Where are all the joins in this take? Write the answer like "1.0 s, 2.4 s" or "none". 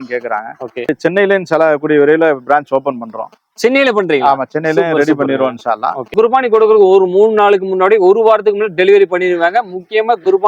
1.0 s, 6.1 s